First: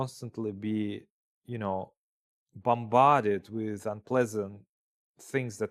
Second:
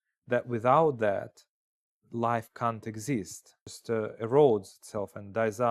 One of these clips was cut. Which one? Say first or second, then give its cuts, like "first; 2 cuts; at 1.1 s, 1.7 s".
second; 1 cut; at 3.7 s